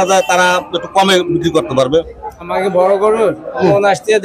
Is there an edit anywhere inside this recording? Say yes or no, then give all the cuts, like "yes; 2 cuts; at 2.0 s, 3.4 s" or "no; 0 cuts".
yes; 1 cut; at 2.5 s